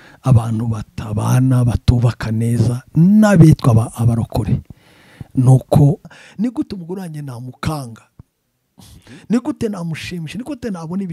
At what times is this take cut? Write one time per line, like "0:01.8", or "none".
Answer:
0:06.1